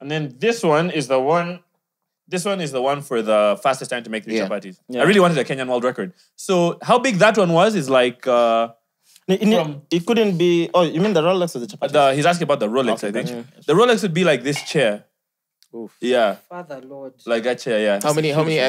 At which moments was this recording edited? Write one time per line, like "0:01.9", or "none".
none